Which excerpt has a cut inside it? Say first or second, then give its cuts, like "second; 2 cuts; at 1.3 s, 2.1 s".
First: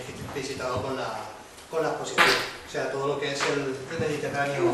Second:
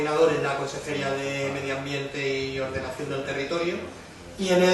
first; 1 cut; at 3.6 s